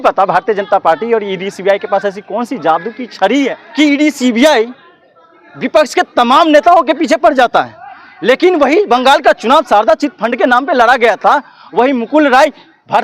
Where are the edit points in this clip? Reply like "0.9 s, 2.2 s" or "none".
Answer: 3.6 s